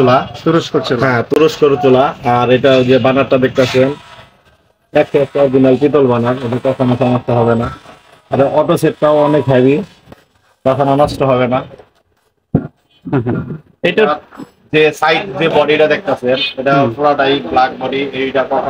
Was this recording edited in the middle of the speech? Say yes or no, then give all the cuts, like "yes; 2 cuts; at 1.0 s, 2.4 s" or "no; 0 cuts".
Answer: no; 0 cuts